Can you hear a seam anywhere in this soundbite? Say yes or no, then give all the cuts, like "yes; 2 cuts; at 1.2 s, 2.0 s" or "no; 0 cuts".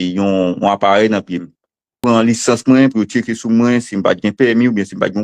yes; 1 cut; at 2.0 s